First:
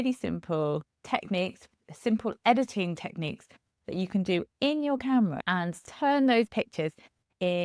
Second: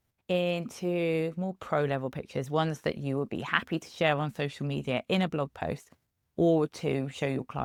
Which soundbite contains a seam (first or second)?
first